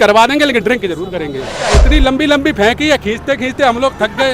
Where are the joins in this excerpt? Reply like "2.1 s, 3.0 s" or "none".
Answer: 1.7 s